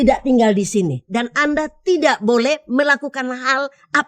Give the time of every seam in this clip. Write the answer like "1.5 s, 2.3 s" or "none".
none